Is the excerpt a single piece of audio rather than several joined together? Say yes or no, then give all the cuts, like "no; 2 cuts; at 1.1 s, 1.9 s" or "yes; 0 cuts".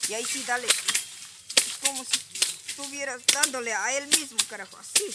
yes; 0 cuts